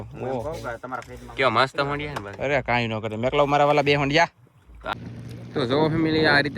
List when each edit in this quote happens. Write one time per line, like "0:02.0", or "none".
0:04.7